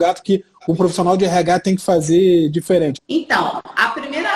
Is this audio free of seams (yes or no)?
no